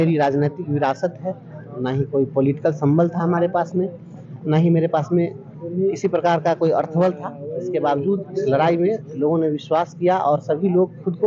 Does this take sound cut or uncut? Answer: uncut